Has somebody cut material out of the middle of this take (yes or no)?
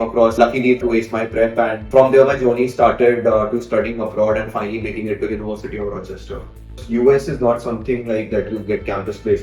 yes